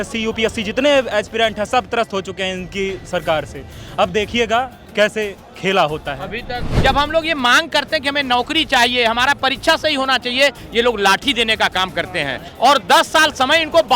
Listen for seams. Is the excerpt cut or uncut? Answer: cut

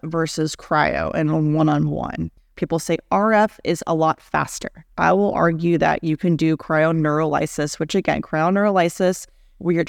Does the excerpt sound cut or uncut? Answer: cut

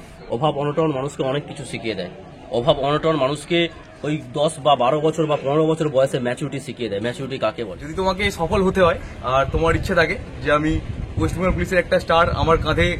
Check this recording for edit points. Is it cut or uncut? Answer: cut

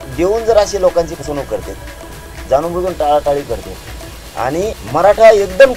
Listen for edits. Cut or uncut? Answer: cut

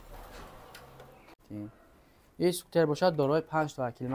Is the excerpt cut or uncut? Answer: cut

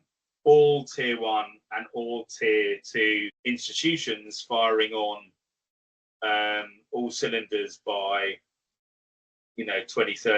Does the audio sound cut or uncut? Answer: cut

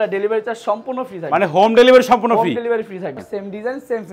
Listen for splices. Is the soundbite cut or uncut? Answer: cut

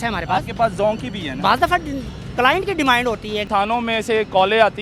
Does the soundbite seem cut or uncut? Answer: cut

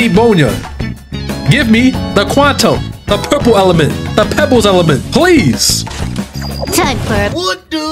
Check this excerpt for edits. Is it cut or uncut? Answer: uncut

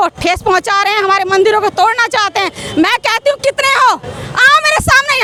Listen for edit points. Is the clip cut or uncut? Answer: uncut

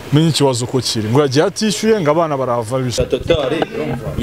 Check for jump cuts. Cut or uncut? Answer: cut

